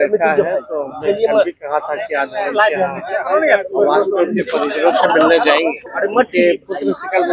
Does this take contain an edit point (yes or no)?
yes